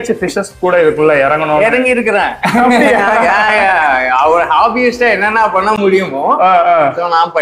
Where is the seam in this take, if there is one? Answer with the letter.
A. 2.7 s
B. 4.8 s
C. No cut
C